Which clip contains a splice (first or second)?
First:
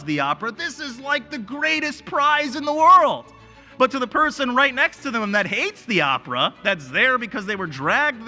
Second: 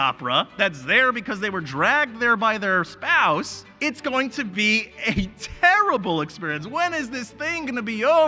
second